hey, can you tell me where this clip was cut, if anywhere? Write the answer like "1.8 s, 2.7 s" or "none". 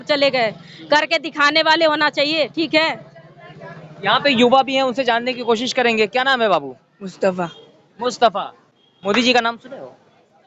none